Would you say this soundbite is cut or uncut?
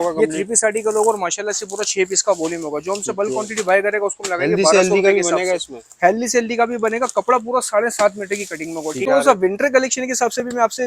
cut